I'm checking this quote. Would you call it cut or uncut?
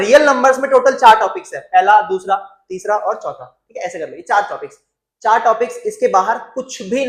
uncut